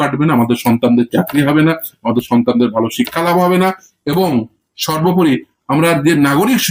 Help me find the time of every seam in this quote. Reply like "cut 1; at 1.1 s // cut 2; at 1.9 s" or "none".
none